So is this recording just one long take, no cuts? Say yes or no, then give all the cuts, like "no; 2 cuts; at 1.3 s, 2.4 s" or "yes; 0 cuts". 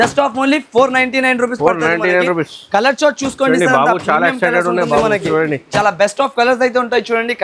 yes; 0 cuts